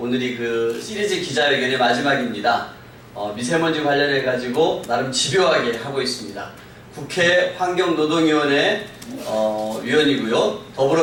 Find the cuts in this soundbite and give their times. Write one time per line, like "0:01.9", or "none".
none